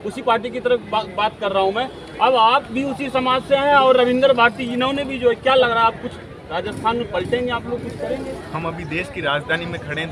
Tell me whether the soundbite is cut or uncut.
uncut